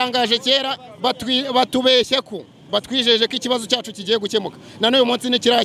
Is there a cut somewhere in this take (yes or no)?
no